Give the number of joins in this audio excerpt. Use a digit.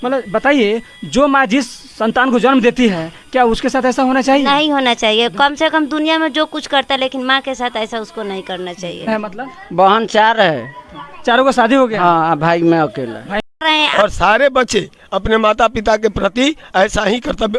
2